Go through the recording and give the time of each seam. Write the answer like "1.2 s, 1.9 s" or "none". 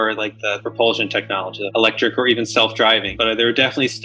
1.6 s